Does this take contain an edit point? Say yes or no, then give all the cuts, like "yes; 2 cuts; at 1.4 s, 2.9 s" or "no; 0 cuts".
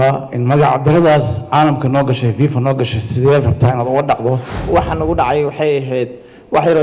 yes; 1 cut; at 4.6 s